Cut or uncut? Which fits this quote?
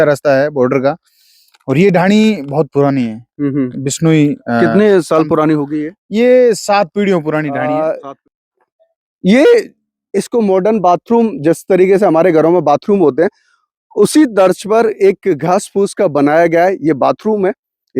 cut